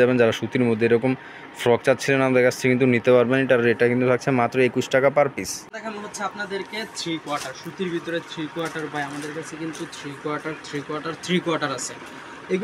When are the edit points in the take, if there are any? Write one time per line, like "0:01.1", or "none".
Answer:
none